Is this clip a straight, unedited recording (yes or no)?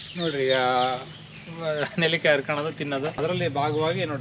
no